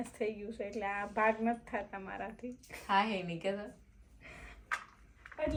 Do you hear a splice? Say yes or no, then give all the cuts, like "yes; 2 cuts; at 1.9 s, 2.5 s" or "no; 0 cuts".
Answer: no; 0 cuts